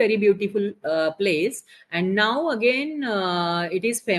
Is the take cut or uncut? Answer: uncut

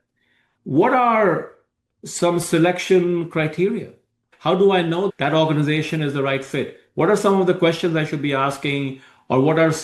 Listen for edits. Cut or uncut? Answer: cut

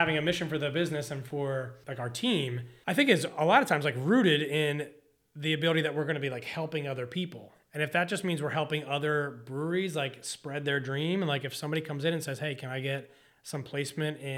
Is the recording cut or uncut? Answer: cut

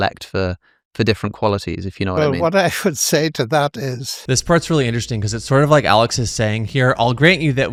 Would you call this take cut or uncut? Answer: uncut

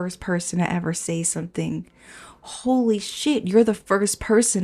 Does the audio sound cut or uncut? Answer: uncut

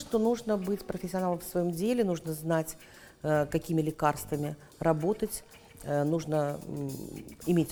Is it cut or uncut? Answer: uncut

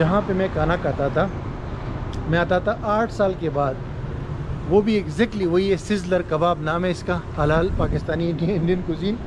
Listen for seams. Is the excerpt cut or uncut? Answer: uncut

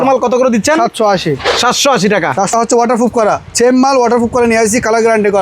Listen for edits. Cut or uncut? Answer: cut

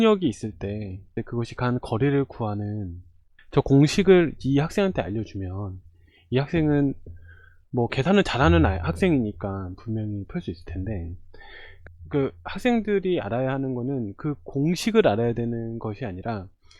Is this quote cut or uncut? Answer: cut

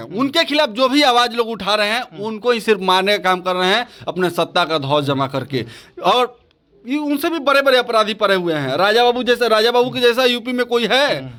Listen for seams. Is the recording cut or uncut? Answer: uncut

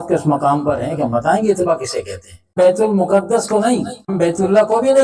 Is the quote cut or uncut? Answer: cut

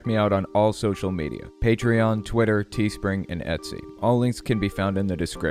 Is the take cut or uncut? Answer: uncut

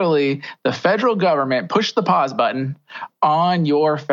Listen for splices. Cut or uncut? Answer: uncut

